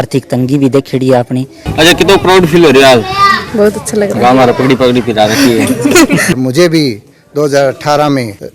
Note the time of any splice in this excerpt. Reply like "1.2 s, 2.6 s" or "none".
1.6 s, 6.4 s